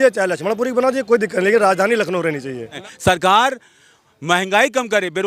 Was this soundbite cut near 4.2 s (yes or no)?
no